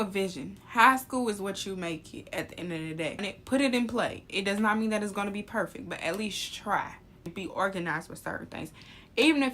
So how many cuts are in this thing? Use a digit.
2